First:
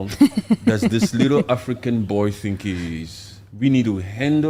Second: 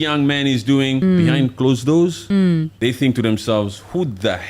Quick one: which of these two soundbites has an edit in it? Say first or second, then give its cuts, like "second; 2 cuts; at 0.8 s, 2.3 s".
second; 2 cuts; at 1.0 s, 2.5 s